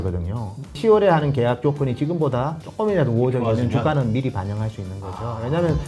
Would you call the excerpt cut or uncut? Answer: cut